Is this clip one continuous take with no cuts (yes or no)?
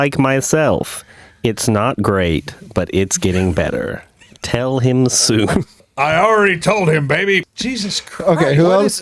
no